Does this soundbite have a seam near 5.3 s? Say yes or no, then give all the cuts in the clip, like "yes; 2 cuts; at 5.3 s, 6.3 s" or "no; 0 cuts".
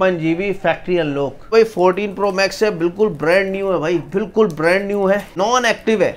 yes; 2 cuts; at 1.5 s, 5.3 s